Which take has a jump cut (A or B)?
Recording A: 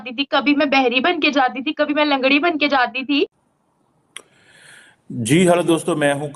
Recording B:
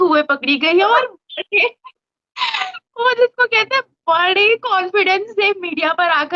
A